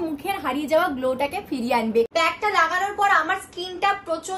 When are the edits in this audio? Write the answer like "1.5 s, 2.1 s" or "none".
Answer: none